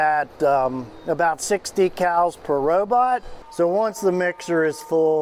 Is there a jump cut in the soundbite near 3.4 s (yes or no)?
yes